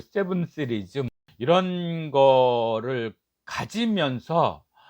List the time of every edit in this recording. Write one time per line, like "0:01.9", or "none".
0:01.2